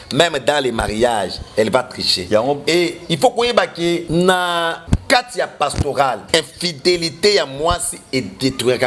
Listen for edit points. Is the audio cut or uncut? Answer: cut